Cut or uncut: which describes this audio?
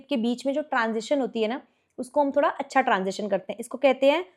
uncut